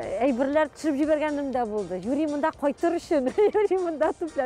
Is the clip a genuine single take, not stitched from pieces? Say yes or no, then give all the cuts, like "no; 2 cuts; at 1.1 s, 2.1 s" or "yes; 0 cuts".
yes; 0 cuts